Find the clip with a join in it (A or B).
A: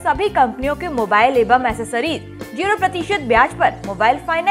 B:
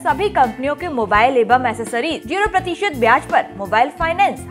B